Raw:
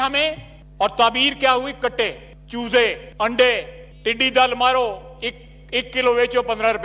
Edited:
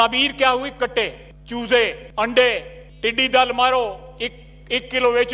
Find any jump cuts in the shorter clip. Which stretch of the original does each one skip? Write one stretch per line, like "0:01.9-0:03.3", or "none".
none